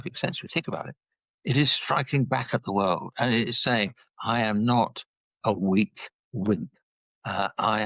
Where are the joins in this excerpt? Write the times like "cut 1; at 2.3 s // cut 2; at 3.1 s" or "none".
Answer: none